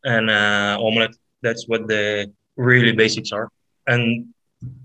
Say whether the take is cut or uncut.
cut